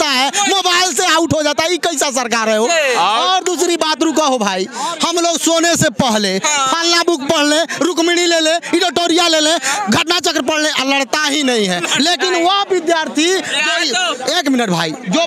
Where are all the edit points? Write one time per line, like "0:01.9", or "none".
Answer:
none